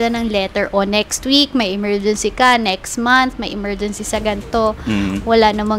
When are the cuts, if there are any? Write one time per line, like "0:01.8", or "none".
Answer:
none